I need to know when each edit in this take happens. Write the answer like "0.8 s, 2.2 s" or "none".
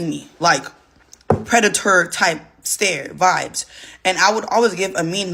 none